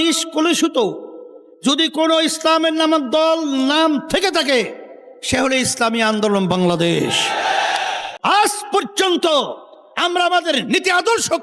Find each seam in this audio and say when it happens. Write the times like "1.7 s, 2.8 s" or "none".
8.1 s